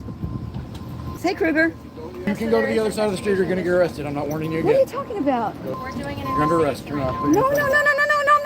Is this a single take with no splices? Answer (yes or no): no